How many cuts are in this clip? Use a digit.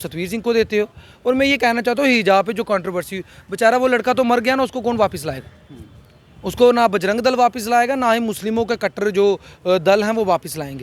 0